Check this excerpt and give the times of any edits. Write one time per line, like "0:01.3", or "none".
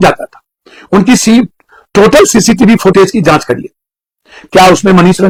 none

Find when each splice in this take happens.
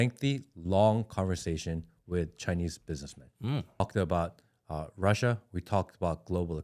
0:03.8

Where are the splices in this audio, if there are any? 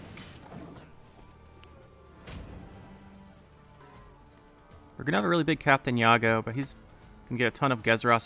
0:03.8

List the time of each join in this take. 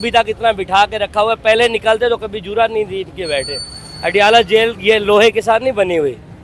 none

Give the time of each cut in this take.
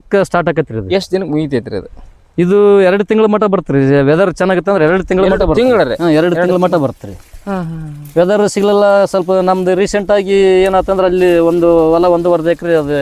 none

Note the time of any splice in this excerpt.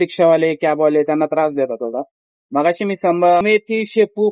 0:03.4

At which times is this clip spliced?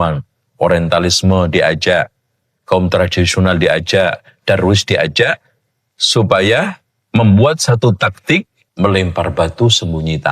0:08.6

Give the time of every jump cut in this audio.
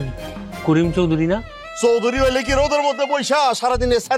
0:01.6

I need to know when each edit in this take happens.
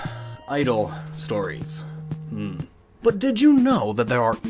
0:02.4

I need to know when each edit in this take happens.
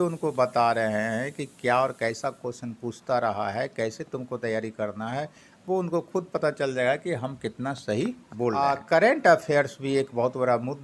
0:08.6

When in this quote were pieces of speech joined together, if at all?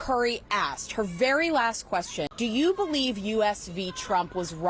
0:02.3

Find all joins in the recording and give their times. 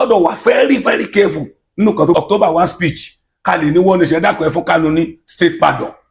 0:02.1

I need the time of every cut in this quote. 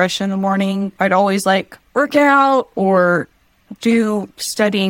0:00.9

